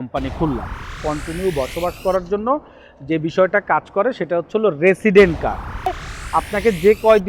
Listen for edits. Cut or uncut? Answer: cut